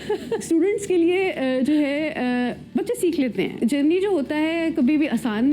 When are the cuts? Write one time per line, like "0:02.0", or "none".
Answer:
0:03.6